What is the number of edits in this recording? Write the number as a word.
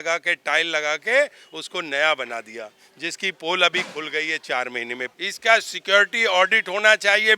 one